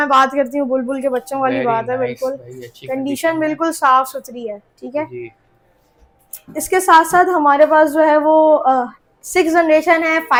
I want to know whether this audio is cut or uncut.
uncut